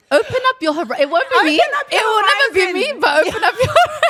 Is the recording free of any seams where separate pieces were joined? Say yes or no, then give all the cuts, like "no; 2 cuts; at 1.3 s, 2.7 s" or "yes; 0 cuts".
yes; 0 cuts